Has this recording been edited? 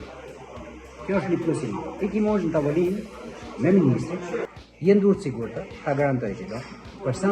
yes; 1 cut; at 4.5 s

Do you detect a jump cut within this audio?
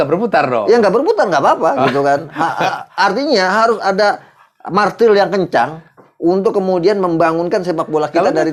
no; 0 cuts

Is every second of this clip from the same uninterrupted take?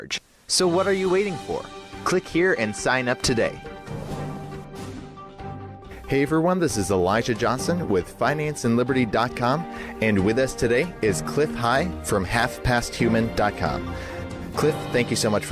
yes; 0 cuts

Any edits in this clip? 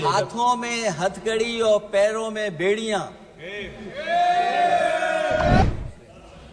yes; 1 cut; at 5.6 s

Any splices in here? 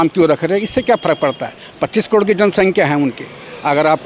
no; 0 cuts

